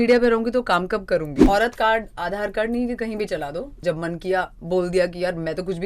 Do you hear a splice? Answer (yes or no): yes